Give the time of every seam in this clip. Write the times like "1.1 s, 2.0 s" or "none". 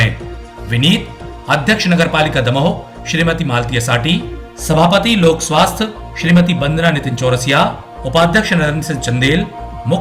none